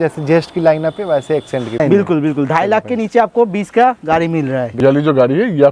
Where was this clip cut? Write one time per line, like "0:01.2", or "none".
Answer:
0:01.8
0:04.7